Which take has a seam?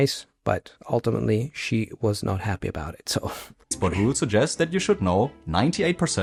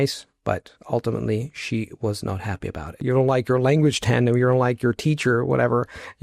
second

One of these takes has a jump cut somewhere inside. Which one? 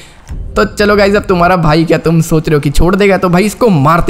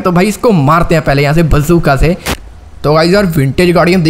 second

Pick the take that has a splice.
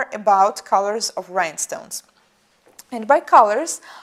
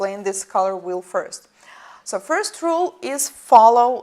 second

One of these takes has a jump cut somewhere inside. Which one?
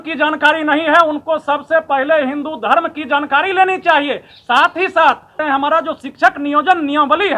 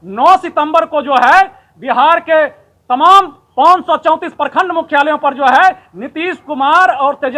first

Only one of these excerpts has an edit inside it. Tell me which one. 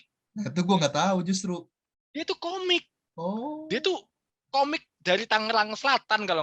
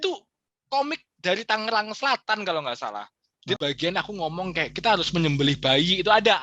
second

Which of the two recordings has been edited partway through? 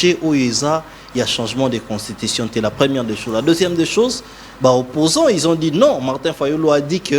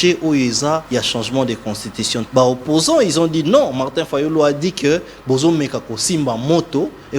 second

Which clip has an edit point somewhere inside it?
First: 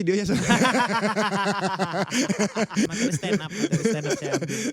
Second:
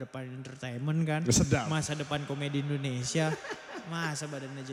first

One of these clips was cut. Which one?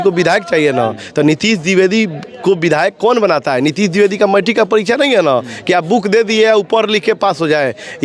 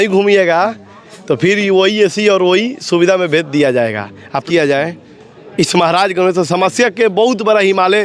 second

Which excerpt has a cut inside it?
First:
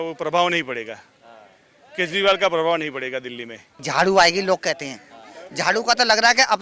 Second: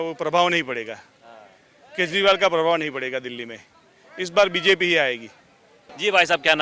first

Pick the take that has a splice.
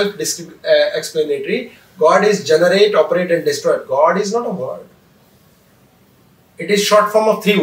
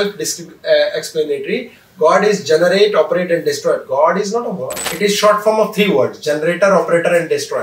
second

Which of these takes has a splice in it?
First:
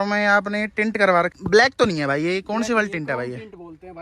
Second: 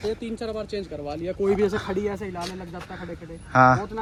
first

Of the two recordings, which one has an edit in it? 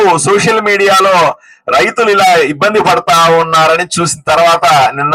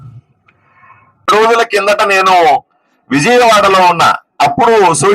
second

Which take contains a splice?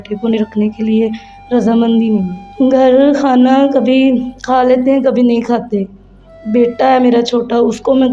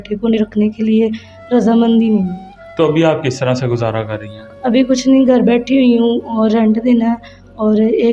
first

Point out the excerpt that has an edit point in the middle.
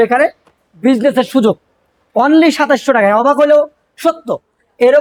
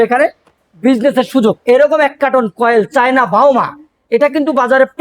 second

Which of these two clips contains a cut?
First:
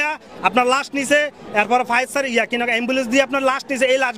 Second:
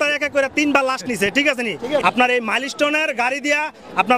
second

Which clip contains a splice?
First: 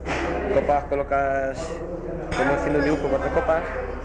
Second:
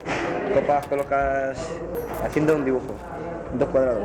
second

